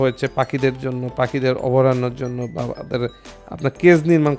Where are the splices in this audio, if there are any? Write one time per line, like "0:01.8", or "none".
none